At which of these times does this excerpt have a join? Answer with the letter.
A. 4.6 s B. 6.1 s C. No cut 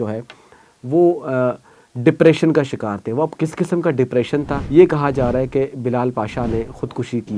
A